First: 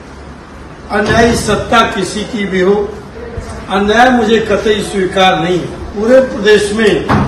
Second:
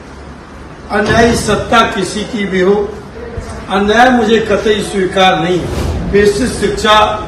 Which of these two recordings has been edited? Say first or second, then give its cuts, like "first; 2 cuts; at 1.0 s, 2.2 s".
second; 1 cut; at 5.8 s